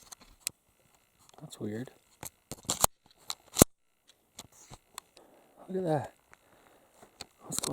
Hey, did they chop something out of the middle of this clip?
yes; 1 cut; at 5.1 s

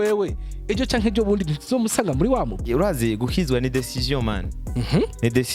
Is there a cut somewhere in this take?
yes; 1 cut; at 2.6 s

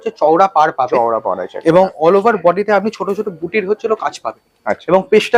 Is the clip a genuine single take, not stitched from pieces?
yes; 0 cuts

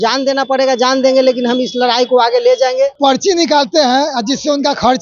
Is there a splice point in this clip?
yes; 1 cut; at 2.9 s

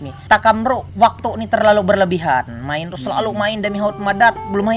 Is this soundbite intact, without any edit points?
yes; 0 cuts

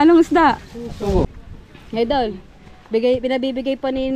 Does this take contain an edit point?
yes; 1 cut; at 1.3 s

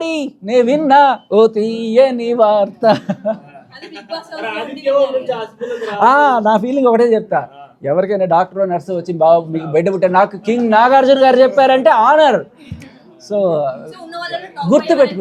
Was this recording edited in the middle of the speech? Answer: no; 0 cuts

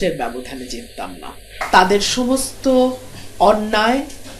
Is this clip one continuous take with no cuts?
no; 1 cut; at 1.6 s

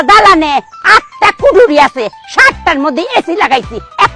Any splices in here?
no; 0 cuts

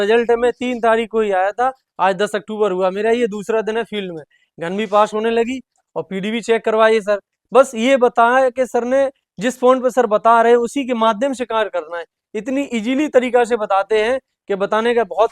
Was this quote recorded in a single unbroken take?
yes; 0 cuts

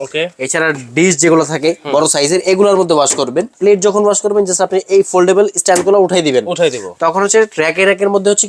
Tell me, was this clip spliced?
yes; 1 cut; at 3.5 s

